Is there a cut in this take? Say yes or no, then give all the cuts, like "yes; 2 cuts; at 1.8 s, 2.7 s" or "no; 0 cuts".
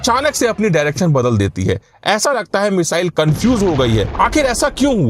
yes; 1 cut; at 4.1 s